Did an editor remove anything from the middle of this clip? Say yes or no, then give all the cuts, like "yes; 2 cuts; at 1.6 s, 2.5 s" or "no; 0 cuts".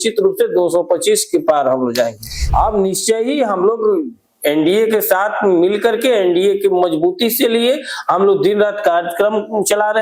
yes; 1 cut; at 2.4 s